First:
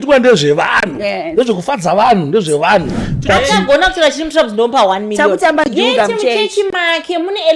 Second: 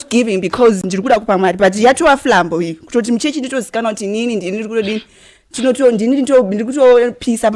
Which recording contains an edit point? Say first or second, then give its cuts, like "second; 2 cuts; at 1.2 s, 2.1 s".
first; 1 cut; at 3.4 s